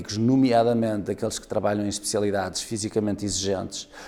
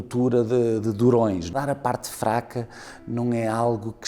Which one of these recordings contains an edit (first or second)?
second